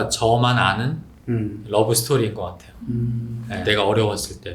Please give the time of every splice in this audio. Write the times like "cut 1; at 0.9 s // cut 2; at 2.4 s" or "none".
cut 1; at 3.6 s